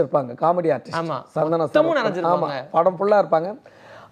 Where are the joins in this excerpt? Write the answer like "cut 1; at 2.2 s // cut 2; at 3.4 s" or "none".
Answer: none